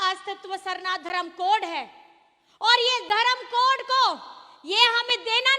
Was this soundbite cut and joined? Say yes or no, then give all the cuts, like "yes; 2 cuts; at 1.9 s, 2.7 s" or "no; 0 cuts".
no; 0 cuts